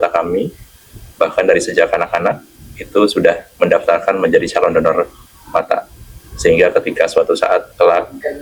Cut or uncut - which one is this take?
uncut